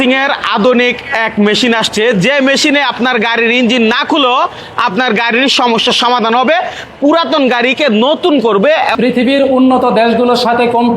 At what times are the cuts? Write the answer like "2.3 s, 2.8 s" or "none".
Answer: 8.9 s